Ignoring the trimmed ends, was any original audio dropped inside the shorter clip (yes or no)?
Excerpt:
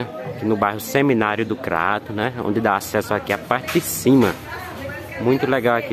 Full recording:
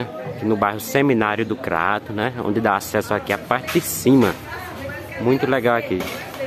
no